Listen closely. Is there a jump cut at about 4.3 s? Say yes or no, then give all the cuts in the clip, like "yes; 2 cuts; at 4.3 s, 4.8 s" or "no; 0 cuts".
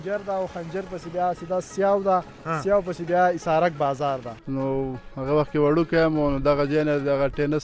yes; 1 cut; at 4.3 s